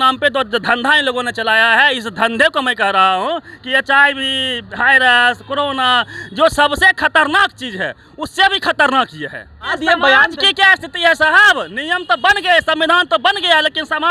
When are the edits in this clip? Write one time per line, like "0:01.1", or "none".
0:09.7